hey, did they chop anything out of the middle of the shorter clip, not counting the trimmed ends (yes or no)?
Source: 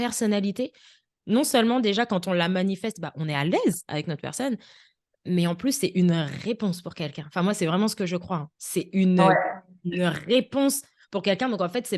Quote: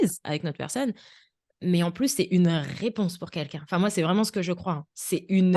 no